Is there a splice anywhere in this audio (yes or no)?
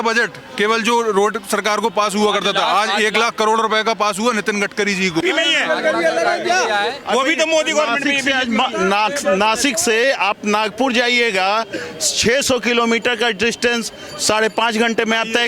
yes